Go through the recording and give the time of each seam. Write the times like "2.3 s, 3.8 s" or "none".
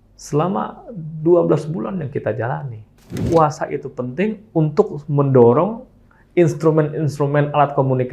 3.2 s